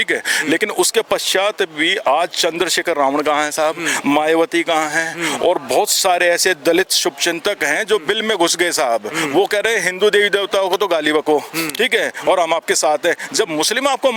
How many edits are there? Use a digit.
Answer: 0